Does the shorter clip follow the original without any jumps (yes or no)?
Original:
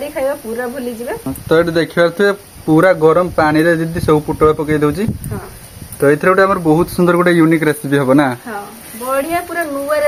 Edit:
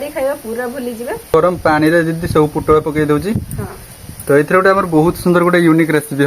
no